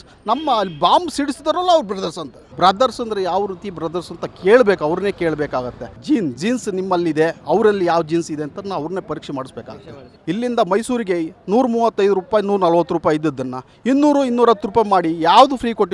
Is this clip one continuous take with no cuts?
no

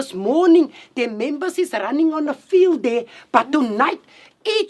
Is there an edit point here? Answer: no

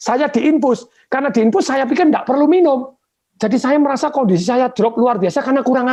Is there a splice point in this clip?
no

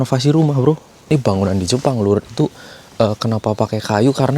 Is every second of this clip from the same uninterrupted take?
no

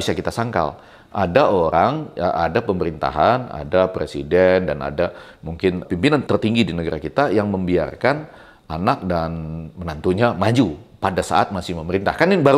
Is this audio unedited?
no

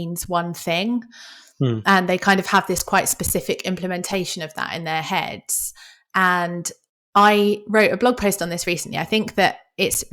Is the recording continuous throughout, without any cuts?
yes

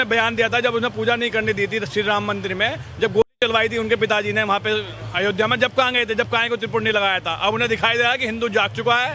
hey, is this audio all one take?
yes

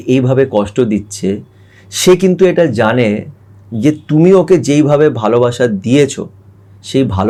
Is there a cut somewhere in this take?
no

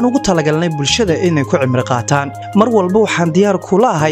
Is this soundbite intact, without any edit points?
yes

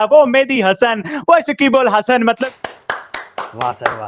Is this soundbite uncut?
no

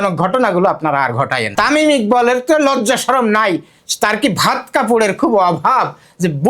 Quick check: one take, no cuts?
no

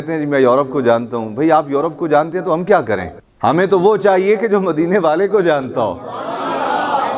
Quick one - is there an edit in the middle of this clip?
no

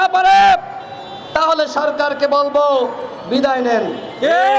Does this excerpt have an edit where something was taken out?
no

